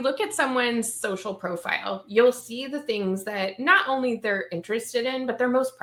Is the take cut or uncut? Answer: uncut